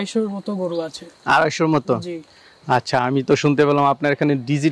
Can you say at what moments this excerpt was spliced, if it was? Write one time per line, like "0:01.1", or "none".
none